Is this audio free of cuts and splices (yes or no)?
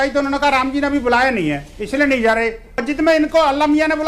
no